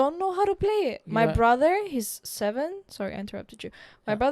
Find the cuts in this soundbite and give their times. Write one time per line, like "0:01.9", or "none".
none